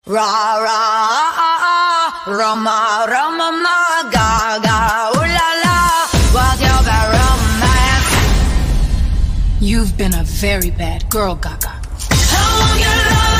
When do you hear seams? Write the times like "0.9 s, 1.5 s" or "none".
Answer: none